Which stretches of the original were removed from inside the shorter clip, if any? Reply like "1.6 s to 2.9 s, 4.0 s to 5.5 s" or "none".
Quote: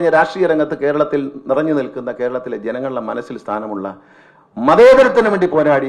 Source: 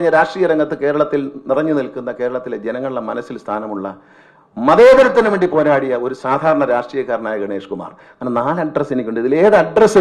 none